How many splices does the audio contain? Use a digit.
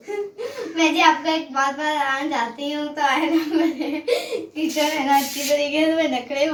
0